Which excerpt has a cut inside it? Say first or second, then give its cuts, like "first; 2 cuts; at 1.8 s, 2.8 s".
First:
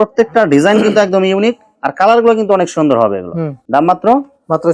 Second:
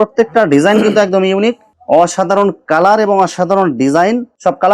second; 1 cut; at 1.7 s